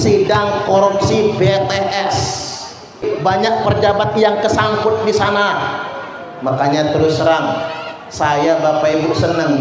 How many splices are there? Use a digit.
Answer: 1